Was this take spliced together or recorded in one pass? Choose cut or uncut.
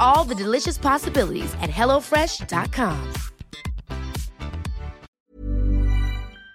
cut